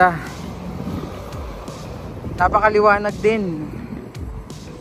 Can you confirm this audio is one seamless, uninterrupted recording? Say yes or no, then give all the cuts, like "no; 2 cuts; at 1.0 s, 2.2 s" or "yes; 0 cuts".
no; 1 cut; at 2.1 s